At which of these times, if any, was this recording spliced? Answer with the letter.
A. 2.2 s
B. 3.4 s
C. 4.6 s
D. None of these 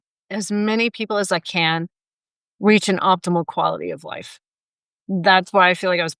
D